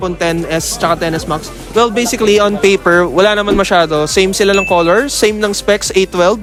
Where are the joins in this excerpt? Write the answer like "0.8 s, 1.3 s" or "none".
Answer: none

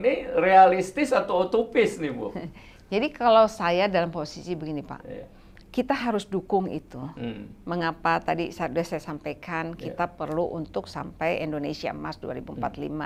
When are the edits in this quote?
none

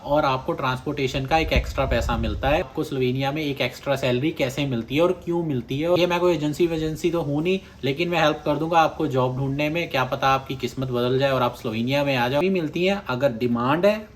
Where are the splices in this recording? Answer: 2.7 s, 5.9 s, 12.4 s

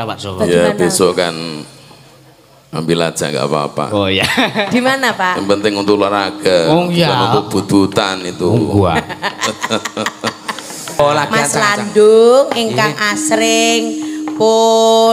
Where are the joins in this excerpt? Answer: 11.0 s

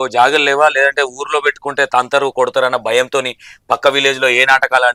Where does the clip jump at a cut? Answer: none

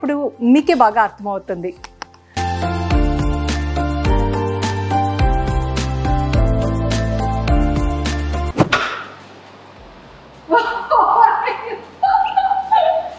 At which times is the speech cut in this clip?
none

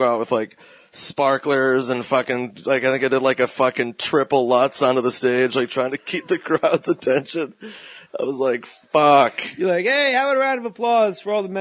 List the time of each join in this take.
none

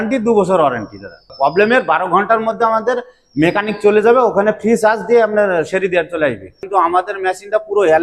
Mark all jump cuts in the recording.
1.3 s, 6.6 s

